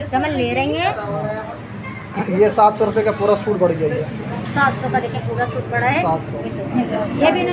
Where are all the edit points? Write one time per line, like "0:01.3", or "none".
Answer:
0:01.0